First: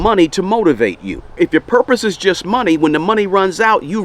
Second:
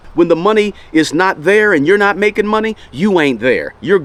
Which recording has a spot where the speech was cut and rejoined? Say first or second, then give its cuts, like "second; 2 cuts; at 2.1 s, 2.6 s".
first; 1 cut; at 1.3 s